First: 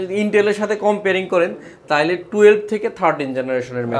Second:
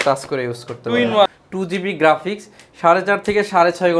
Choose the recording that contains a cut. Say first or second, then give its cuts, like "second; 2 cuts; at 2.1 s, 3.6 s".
second; 1 cut; at 1.3 s